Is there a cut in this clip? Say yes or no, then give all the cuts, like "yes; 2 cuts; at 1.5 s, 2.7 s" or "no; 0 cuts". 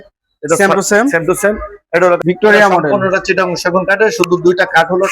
yes; 1 cut; at 2.2 s